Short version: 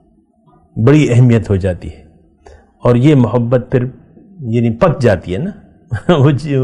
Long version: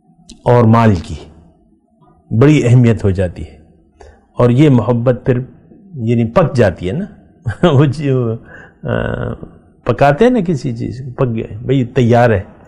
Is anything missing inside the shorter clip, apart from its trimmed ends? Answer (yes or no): no